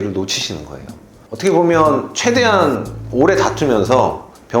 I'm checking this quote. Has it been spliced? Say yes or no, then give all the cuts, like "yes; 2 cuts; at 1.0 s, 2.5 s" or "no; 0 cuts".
yes; 1 cut; at 1.2 s